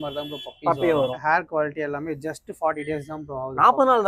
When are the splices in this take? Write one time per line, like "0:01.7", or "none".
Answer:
0:01.2